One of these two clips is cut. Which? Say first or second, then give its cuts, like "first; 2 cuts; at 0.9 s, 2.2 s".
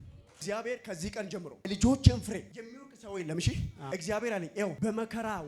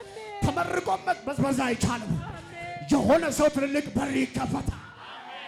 first; 4 cuts; at 1.7 s, 2.6 s, 3.8 s, 4.8 s